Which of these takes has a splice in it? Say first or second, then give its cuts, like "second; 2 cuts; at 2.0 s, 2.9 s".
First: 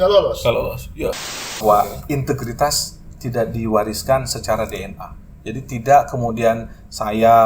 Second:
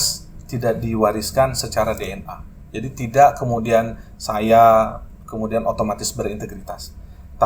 first; 1 cut; at 1.4 s